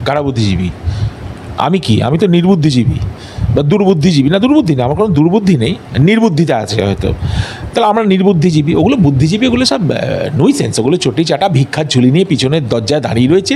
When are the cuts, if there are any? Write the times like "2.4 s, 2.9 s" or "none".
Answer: none